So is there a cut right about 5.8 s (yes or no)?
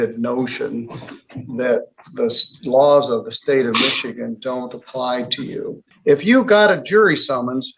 yes